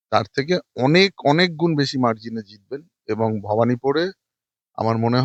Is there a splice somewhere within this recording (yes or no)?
no